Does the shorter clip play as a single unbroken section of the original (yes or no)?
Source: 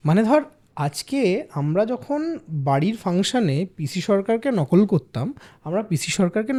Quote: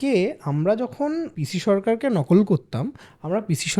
no